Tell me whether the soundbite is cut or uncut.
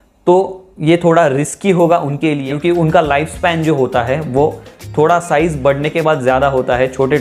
cut